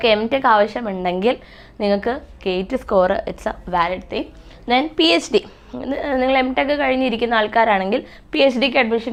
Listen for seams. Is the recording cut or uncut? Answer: uncut